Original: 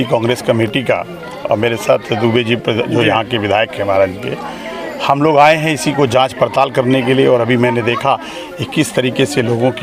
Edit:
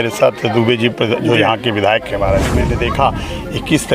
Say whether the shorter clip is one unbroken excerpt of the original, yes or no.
no